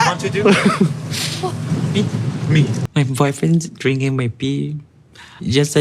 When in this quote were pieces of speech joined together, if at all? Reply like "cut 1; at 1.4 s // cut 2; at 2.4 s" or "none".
cut 1; at 2.8 s